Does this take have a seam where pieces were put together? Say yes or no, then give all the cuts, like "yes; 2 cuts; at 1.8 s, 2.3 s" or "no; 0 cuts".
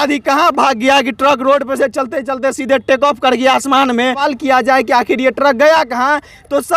yes; 1 cut; at 4.2 s